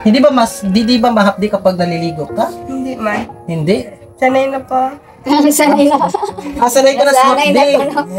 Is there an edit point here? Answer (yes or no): no